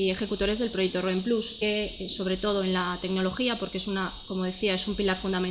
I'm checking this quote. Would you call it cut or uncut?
uncut